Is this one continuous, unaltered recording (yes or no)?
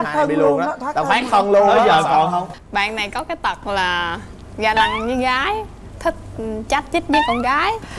no